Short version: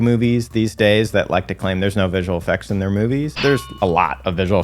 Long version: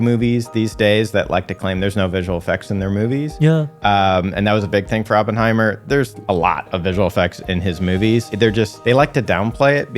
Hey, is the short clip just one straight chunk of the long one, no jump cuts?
no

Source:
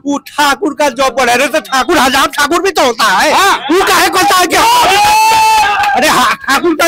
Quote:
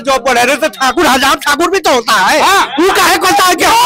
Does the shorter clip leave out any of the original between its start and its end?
no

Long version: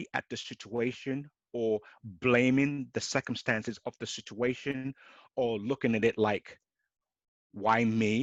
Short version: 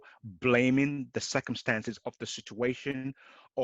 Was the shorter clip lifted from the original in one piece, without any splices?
yes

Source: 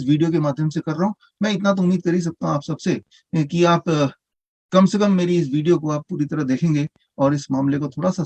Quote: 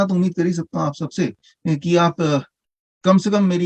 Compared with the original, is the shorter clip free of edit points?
yes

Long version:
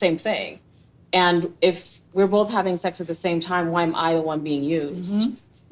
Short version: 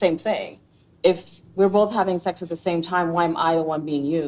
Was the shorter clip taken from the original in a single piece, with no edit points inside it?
no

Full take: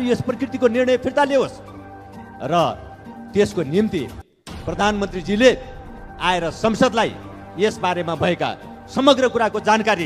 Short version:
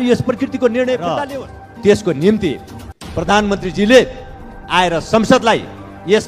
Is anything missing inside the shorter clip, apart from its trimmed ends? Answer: yes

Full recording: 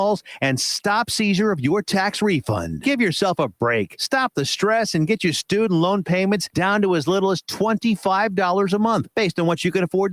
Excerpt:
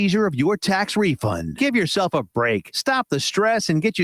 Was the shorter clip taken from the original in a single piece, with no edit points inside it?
yes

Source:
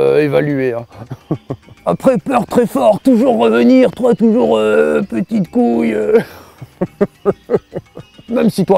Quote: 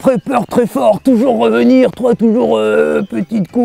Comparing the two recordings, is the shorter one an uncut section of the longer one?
yes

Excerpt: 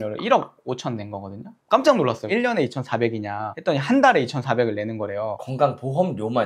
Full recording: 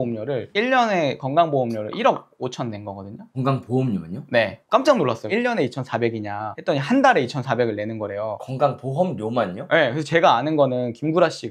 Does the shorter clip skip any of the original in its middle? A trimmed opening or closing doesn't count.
yes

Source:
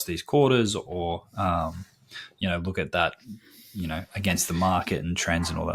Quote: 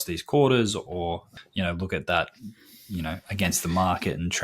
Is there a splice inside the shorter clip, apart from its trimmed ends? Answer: yes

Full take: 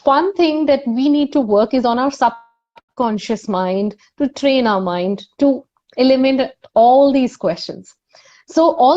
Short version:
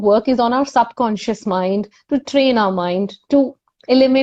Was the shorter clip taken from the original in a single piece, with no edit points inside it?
no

